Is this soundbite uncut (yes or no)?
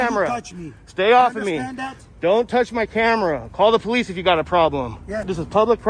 yes